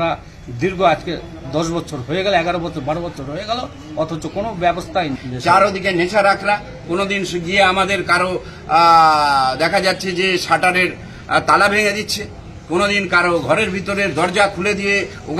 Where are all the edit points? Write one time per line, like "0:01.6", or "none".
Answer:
0:05.3